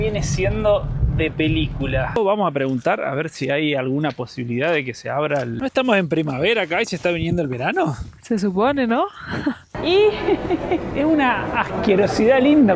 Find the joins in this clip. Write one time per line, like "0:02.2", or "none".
0:02.2
0:05.5
0:09.7